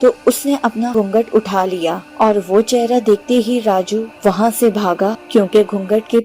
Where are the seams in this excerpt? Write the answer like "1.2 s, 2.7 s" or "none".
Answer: 0.9 s, 2.0 s, 4.1 s, 5.2 s